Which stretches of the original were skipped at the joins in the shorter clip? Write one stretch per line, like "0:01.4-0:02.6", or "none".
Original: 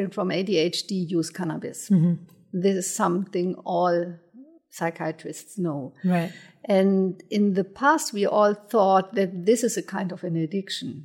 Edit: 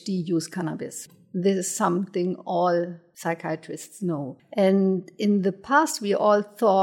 0:01.8-0:02.2
0:04.2-0:04.6
0:05.9-0:06.5

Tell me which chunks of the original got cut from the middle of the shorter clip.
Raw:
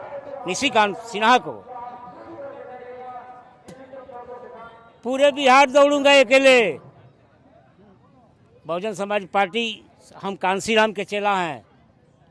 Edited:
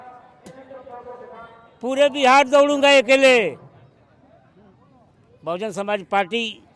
none

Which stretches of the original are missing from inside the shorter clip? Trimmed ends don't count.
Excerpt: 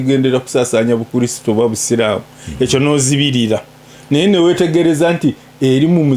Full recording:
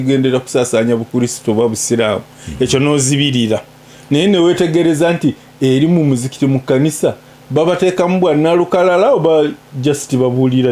none

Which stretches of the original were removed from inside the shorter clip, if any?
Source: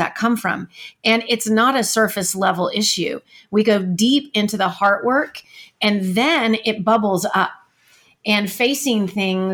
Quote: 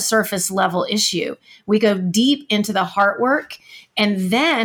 none

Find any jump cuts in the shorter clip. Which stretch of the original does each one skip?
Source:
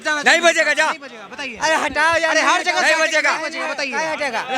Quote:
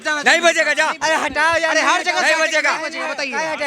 0:01.0-0:01.6

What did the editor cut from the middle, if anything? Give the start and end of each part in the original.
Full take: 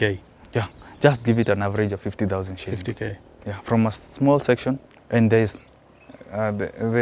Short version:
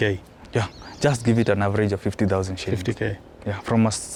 none

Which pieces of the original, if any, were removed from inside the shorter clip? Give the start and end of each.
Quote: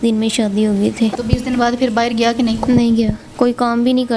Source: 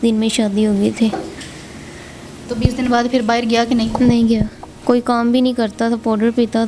0:01.2-0:02.5
0:04.5-0:04.7

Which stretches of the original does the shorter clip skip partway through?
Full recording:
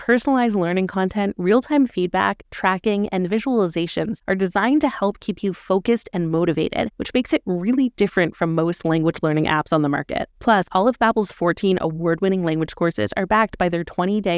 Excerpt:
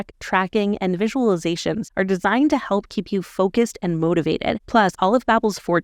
0:06.9-0:10.3

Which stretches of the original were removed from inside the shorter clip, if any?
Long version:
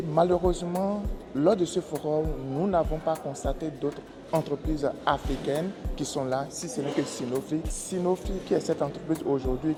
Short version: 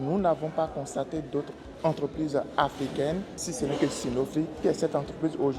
0:05.9-0:06.5
0:07.7-0:08.4

